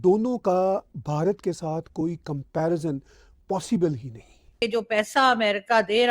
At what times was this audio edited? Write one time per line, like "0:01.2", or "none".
0:04.6